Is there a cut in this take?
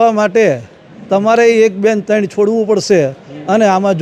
no; 0 cuts

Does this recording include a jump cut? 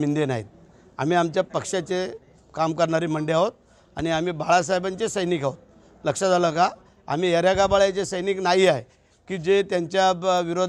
no; 0 cuts

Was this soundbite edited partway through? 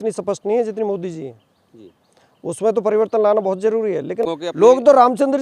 yes; 1 cut; at 4.2 s

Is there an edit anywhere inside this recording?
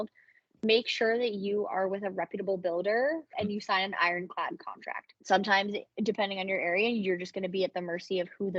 yes; 2 cuts; at 3.4 s, 5.1 s

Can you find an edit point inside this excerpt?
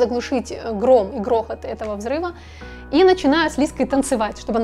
no; 0 cuts

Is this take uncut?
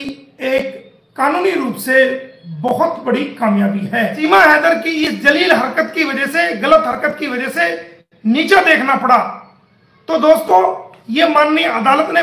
no; 1 cut; at 4.2 s

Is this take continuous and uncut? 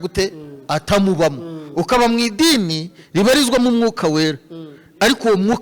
yes; 0 cuts

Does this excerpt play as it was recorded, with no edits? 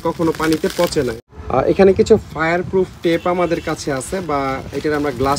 no; 1 cut; at 1.3 s

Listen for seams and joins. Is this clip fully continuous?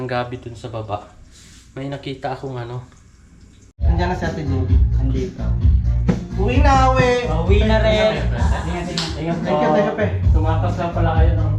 no; 1 cut; at 3.7 s

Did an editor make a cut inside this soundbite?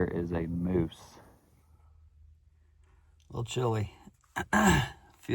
yes; 1 cut; at 1.6 s

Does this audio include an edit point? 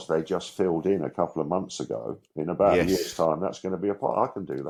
no; 0 cuts

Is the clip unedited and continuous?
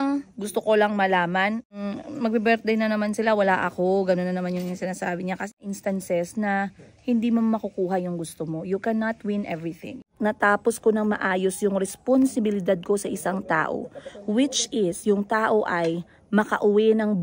no; 3 cuts; at 1.7 s, 5.5 s, 10.1 s

